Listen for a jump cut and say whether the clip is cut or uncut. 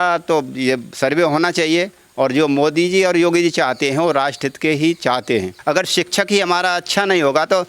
cut